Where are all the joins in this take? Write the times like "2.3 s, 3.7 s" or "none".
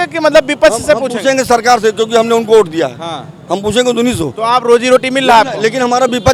none